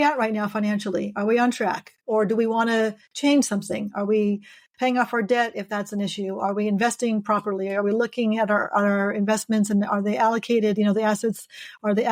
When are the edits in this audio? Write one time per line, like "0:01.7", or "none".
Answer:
none